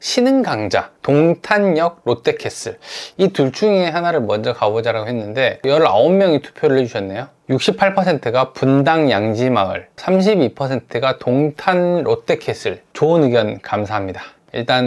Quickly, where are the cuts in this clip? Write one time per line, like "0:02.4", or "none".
none